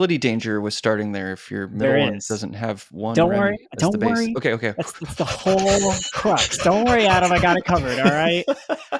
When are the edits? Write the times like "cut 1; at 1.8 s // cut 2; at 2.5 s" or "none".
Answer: none